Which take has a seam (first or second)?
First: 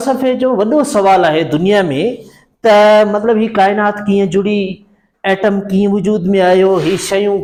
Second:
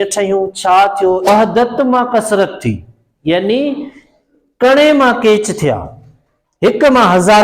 second